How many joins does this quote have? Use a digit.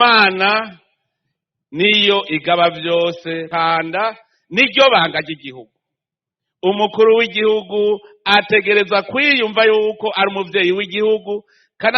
1